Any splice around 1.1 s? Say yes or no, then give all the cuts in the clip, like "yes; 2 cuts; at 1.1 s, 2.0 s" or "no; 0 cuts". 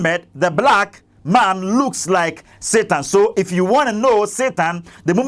no; 0 cuts